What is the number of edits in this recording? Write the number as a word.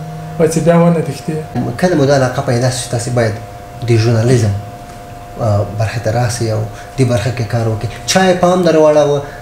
one